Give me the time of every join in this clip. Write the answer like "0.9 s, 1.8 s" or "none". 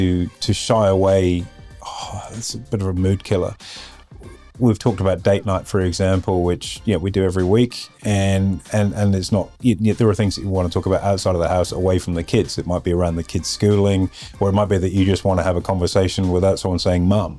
9.5 s